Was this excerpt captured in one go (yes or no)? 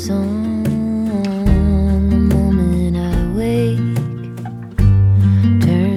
yes